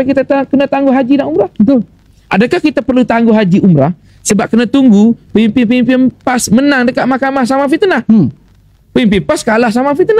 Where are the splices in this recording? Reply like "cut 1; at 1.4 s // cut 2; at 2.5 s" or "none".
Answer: none